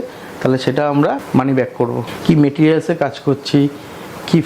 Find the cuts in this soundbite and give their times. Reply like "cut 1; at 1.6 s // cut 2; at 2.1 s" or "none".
cut 1; at 1.2 s // cut 2; at 2.1 s